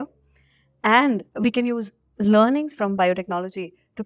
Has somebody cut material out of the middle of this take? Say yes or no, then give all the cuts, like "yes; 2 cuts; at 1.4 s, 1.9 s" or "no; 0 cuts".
yes; 1 cut; at 1.3 s